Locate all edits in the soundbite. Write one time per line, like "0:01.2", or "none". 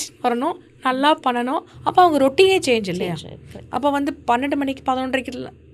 0:01.7